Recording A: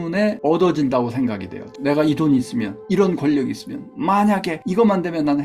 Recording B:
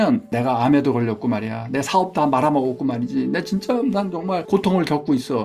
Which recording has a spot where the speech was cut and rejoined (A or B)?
A